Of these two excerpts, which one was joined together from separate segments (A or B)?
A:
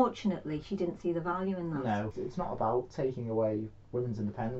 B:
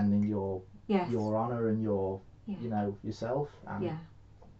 A